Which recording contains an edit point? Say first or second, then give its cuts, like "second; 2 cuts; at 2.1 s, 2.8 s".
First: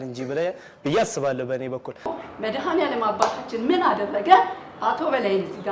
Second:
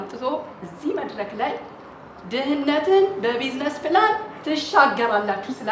first; 1 cut; at 2.2 s